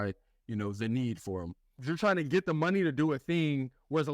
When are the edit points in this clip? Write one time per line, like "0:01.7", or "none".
0:01.9